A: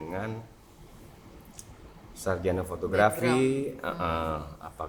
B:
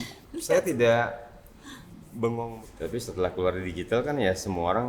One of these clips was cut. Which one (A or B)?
B